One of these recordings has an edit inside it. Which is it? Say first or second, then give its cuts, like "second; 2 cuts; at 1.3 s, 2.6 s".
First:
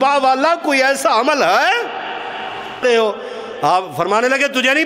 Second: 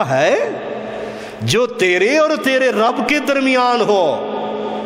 first; 1 cut; at 2.8 s